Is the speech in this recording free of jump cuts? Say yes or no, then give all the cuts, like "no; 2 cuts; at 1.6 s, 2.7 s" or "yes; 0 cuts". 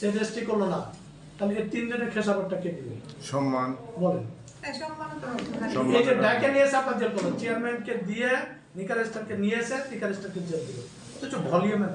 yes; 0 cuts